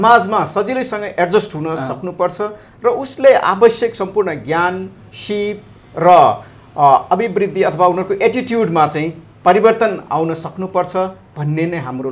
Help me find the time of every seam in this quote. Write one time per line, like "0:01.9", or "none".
none